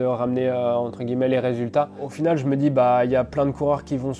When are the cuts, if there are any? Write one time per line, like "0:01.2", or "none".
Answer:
0:02.1